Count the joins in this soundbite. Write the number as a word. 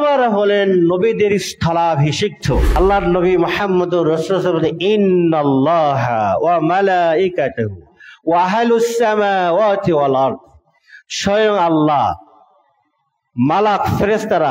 one